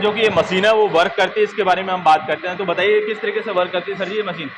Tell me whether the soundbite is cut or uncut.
uncut